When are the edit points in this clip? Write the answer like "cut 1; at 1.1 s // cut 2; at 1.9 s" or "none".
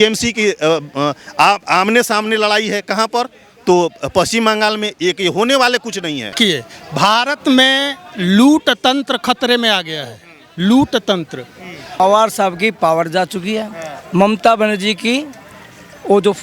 cut 1; at 6.4 s // cut 2; at 11.8 s